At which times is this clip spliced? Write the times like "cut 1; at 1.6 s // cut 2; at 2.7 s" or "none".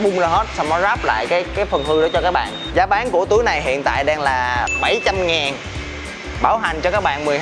cut 1; at 2.6 s